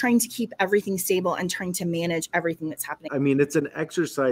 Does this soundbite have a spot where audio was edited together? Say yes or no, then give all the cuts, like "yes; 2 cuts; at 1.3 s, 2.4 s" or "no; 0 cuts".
yes; 1 cut; at 3.0 s